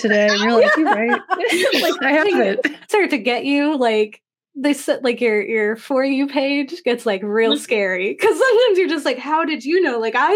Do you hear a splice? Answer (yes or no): yes